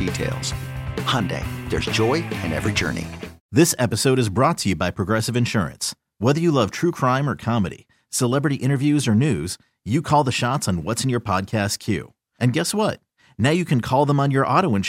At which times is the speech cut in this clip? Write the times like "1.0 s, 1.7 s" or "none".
3.4 s